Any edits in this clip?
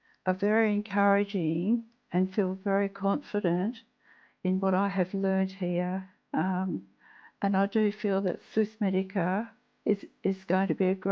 no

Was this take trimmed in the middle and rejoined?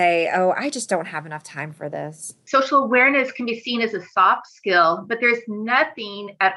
yes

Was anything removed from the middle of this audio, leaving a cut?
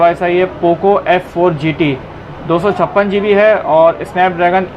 no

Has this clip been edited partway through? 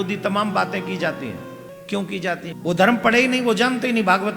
yes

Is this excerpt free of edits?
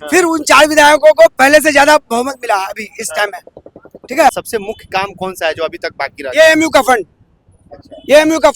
no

